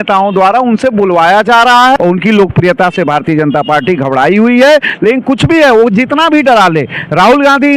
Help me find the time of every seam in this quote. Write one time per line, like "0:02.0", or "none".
0:02.0